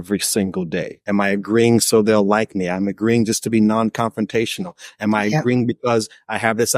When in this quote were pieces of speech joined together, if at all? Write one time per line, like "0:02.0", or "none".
0:00.9